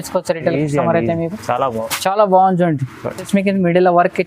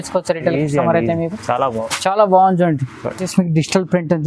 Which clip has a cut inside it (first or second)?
first